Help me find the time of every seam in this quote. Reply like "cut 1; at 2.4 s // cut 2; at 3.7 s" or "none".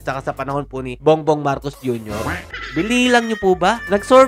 none